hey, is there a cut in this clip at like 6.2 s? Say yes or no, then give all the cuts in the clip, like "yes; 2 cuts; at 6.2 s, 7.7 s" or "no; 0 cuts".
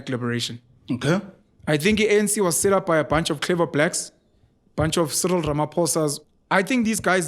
yes; 1 cut; at 6.2 s